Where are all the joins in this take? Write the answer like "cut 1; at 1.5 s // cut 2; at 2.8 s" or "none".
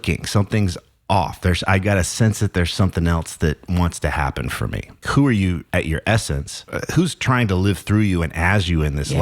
cut 1; at 5.1 s // cut 2; at 5.6 s // cut 3; at 6.6 s